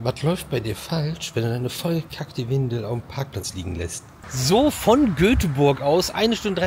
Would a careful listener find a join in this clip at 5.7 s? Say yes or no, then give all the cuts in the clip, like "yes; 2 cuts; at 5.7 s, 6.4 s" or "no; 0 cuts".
no; 1 cut; at 4.4 s